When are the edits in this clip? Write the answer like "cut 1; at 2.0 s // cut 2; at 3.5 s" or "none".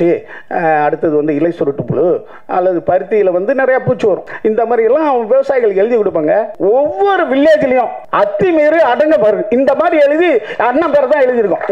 cut 1; at 4.3 s // cut 2; at 6.5 s // cut 3; at 8.0 s